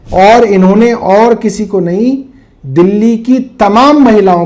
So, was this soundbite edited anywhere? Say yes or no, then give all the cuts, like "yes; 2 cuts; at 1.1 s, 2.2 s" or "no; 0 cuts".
no; 0 cuts